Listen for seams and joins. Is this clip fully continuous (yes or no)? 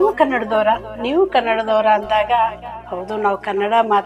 yes